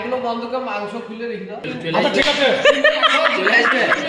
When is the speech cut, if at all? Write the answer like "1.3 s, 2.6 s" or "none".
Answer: 1.6 s

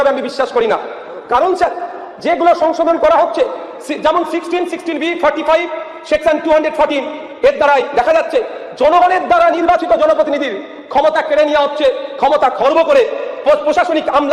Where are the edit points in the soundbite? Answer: none

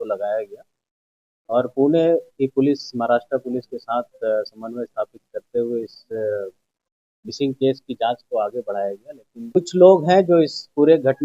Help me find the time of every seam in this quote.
9.6 s

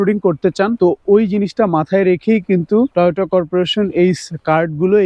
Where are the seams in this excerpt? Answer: 0.7 s, 2.9 s

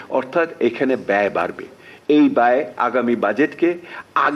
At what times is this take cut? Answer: none

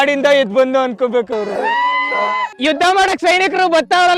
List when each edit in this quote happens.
1.5 s

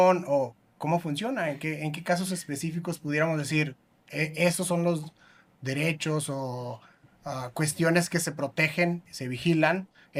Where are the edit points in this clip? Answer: none

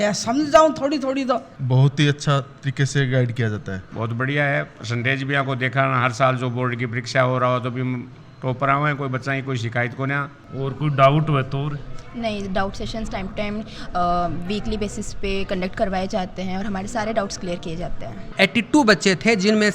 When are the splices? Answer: 1.6 s, 3.9 s, 10.4 s, 18.3 s

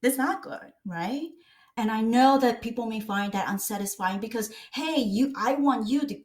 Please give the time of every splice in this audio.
1.7 s

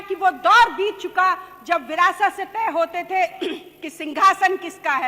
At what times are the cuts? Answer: none

